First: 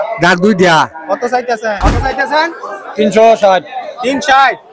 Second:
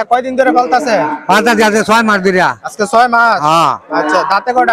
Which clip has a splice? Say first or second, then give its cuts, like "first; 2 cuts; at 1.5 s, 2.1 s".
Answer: first; 1 cut; at 1.8 s